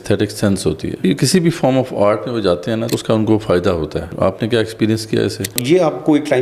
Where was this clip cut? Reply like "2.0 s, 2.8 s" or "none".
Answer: 1.0 s, 2.9 s, 4.1 s, 5.6 s